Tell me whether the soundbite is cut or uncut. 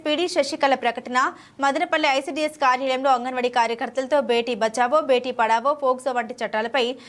uncut